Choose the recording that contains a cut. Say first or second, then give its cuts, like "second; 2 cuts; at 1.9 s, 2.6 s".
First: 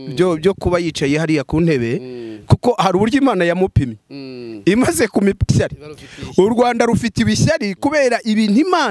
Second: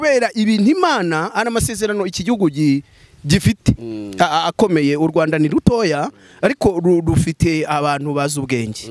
first; 1 cut; at 5.5 s